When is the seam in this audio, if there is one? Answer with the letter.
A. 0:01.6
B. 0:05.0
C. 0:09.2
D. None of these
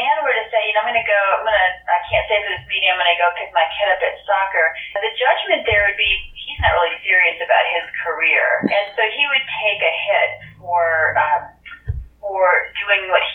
B